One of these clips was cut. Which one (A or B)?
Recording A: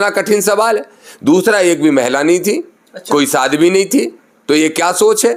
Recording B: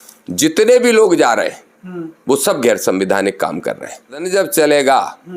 B